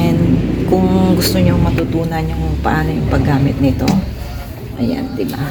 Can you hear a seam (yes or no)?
no